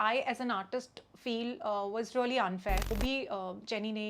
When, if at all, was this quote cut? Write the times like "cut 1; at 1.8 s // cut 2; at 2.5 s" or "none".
cut 1; at 2.9 s